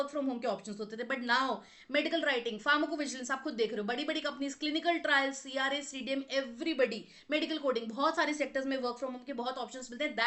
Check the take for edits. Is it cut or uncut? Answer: uncut